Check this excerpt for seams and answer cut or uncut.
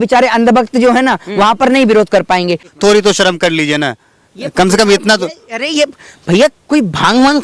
cut